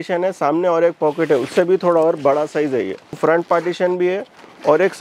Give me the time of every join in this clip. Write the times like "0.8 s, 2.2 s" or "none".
3.2 s